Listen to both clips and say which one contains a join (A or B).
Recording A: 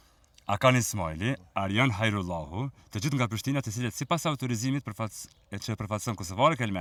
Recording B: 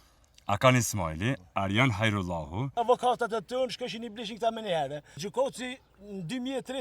B